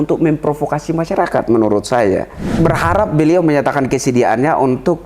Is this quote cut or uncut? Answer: cut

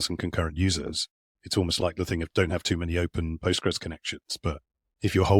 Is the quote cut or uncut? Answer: cut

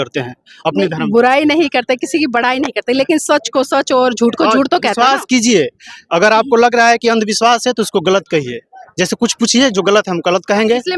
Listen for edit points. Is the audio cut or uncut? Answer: uncut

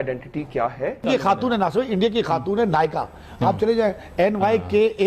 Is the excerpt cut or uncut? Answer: cut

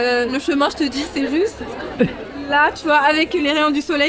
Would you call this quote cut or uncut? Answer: uncut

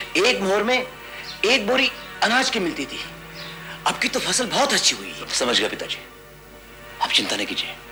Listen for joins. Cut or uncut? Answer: uncut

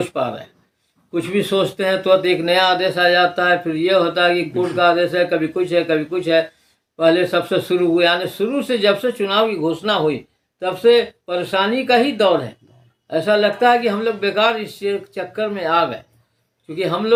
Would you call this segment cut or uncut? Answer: uncut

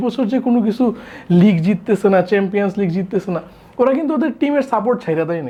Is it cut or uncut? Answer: uncut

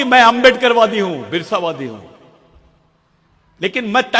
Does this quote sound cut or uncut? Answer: uncut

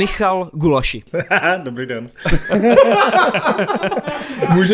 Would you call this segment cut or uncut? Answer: cut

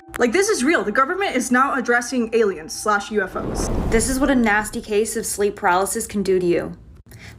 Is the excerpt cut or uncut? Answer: cut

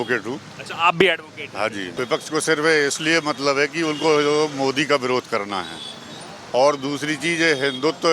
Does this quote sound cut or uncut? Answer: cut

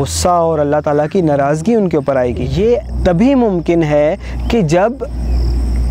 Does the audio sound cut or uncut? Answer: cut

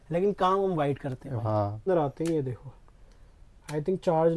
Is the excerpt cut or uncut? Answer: cut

